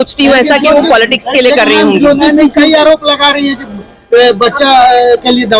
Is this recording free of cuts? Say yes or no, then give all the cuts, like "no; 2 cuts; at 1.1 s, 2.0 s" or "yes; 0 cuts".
yes; 0 cuts